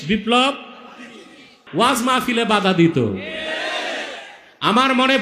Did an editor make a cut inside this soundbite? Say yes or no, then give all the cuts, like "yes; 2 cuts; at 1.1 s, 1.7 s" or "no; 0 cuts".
yes; 1 cut; at 1.6 s